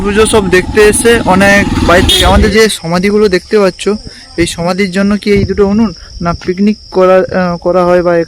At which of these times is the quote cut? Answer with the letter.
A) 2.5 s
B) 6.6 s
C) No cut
A